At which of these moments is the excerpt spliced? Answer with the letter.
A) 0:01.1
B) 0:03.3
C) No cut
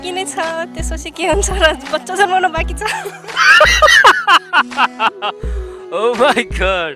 C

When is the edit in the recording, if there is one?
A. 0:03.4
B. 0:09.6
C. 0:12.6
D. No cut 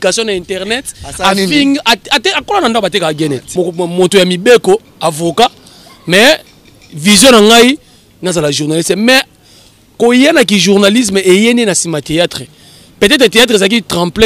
A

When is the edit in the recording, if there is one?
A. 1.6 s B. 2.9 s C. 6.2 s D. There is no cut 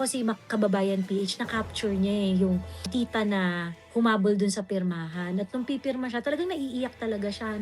B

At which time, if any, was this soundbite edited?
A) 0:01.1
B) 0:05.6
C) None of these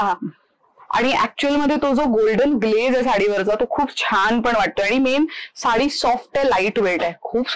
C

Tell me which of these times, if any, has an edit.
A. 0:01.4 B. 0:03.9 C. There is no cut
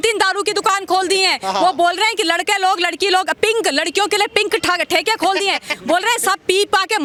C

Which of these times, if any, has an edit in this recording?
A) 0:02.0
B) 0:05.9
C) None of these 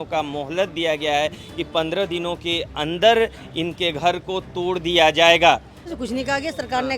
B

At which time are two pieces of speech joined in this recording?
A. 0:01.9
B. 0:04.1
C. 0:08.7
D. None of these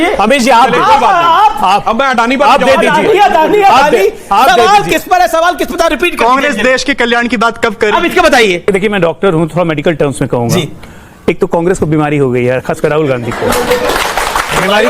C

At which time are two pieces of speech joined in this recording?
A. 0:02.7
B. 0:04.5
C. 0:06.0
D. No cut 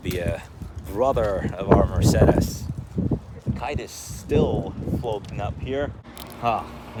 D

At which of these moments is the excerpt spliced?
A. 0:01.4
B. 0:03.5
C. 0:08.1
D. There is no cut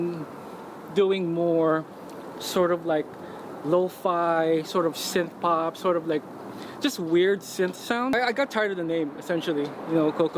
C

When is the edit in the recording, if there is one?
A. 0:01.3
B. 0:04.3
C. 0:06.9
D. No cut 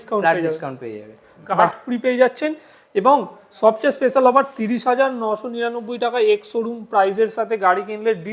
A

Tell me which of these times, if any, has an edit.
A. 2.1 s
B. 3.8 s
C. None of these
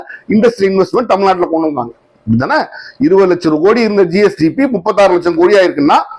C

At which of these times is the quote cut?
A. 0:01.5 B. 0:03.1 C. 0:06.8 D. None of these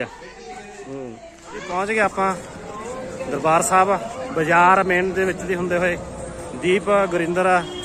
A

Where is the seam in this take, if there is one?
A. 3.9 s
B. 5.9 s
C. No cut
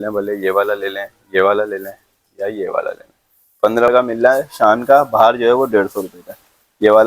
A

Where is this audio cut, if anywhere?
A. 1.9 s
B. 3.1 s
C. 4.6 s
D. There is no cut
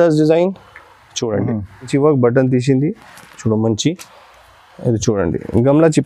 A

